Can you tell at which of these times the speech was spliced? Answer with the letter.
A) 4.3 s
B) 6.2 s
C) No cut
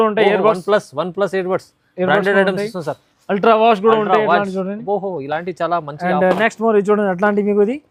C